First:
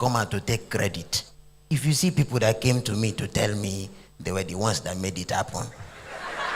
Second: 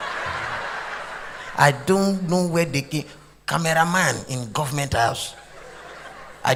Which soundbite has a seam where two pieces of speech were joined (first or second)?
first